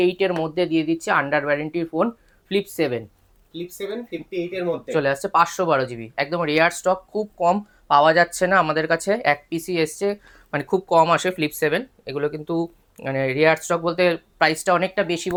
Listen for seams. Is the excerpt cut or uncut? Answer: uncut